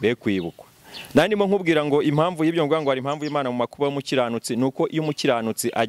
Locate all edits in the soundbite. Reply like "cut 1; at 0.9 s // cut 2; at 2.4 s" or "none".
none